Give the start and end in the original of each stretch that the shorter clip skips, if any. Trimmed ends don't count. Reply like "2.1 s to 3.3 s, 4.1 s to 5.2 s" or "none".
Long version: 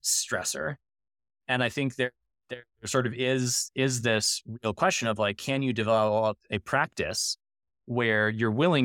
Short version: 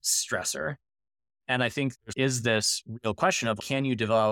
1.9 s to 3.5 s, 5.2 s to 5.3 s